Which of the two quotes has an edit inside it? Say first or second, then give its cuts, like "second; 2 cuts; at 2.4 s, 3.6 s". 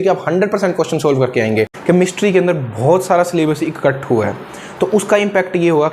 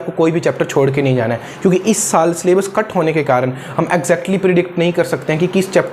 first; 1 cut; at 1.8 s